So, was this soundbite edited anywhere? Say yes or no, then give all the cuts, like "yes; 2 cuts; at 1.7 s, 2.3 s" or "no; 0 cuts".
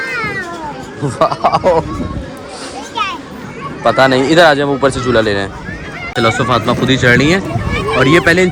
no; 0 cuts